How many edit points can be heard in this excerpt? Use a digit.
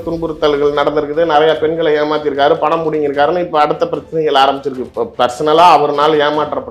1